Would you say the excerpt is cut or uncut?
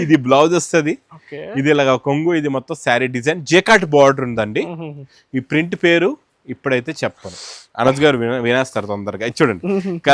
uncut